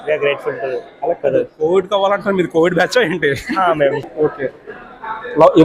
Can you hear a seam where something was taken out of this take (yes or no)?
yes